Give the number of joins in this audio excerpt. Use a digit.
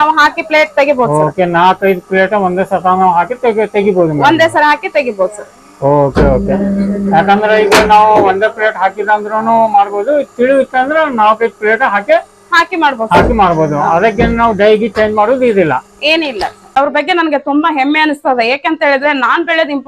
1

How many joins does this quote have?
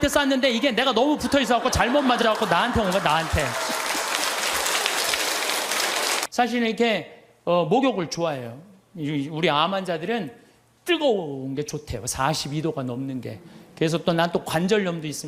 1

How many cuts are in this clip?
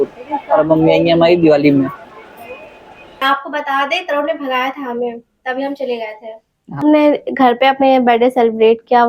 2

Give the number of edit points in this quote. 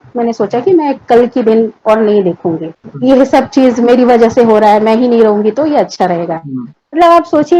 1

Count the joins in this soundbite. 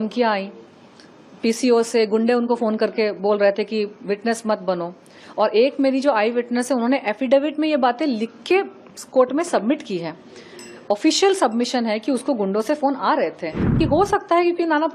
1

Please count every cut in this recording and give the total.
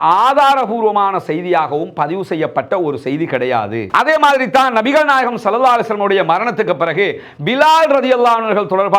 1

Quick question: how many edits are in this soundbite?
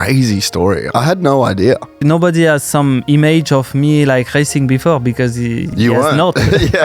2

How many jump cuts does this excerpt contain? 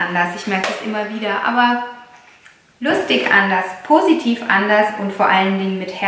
0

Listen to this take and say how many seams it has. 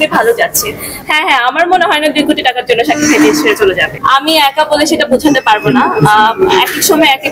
2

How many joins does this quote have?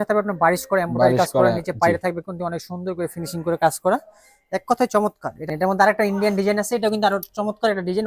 1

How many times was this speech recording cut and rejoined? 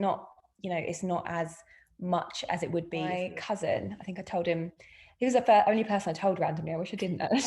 1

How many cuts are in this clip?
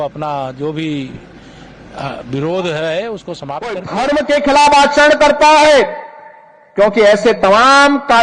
1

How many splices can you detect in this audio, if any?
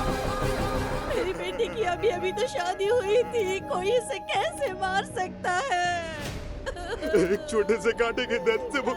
1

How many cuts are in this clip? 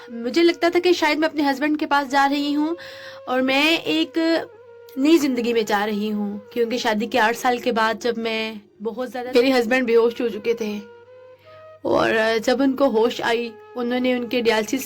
1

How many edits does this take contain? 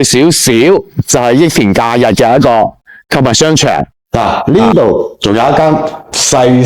1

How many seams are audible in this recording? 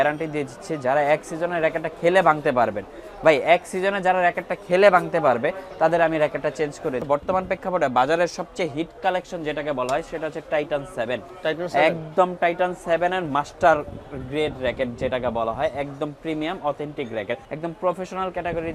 2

